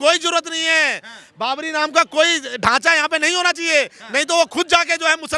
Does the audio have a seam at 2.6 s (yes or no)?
no